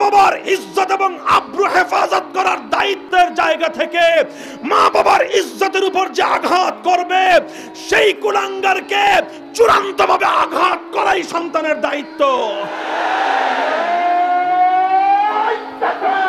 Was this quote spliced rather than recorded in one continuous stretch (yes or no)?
no